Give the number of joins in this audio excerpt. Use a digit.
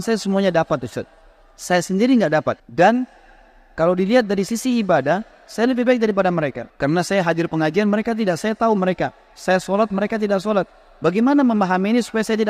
2